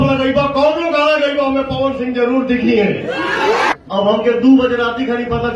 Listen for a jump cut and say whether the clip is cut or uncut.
cut